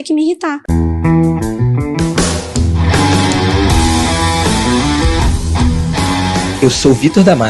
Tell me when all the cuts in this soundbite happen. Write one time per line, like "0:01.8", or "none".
0:01.0